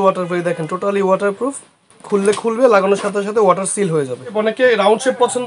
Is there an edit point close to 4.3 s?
yes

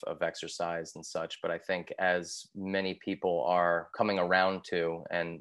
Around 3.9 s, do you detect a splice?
yes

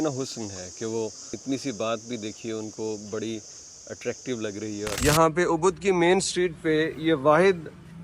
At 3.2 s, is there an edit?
no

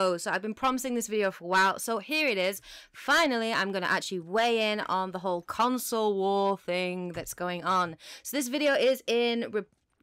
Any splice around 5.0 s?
yes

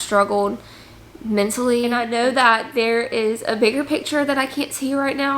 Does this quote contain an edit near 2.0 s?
yes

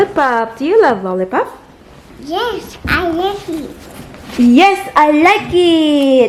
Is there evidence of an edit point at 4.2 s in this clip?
no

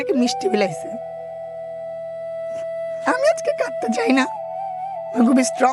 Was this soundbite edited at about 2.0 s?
no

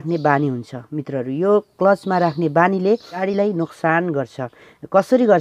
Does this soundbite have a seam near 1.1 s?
no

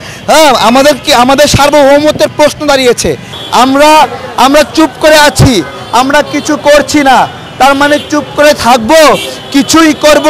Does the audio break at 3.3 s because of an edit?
yes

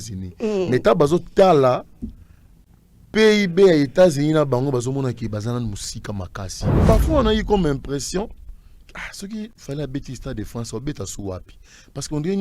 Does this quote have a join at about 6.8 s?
yes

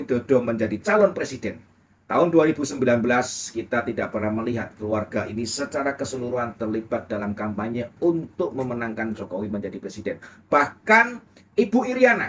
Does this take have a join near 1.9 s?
no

